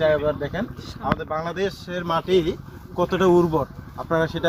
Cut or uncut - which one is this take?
uncut